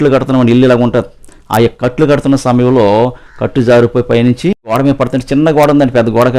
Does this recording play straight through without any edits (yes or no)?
no